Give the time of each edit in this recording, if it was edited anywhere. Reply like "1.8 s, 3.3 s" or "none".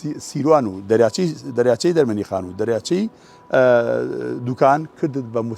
none

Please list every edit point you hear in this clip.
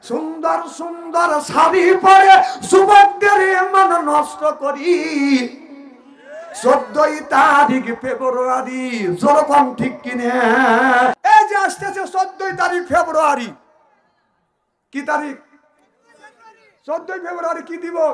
11.2 s

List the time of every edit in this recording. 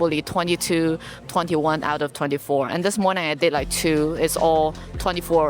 none

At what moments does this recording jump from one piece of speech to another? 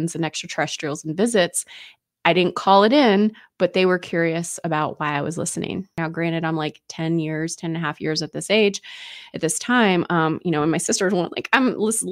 6.0 s

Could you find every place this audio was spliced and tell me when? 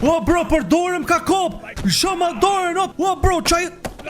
2.9 s

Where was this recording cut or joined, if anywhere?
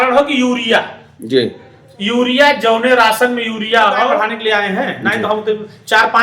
4.3 s

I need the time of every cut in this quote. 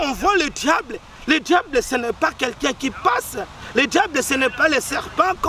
none

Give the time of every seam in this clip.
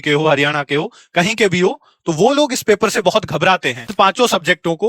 3.9 s

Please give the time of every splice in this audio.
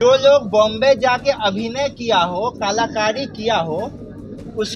none

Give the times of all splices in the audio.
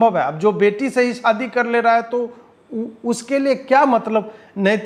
none

